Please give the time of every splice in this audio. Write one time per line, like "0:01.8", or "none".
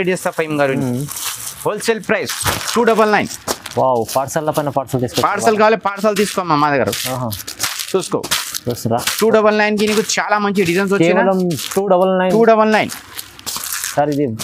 none